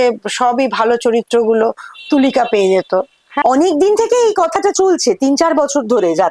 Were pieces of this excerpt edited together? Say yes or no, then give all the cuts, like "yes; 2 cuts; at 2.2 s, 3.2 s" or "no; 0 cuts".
yes; 1 cut; at 3.2 s